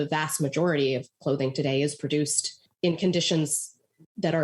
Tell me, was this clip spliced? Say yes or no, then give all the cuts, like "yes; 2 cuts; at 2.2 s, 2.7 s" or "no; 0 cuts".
no; 0 cuts